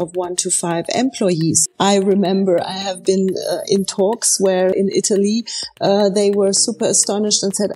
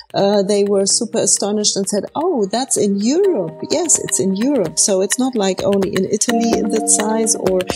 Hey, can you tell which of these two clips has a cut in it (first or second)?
first